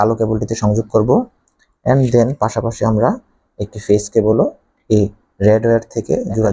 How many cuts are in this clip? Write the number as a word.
zero